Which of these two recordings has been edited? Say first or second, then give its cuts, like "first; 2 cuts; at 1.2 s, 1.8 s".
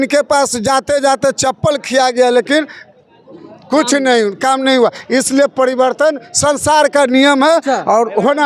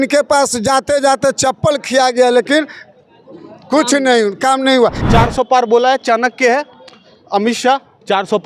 second; 1 cut; at 5.0 s